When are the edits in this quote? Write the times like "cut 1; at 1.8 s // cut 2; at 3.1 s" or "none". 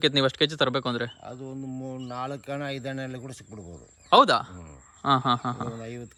none